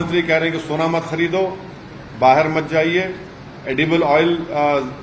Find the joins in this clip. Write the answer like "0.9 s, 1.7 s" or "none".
none